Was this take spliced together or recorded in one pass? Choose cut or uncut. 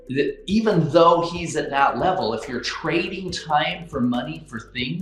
uncut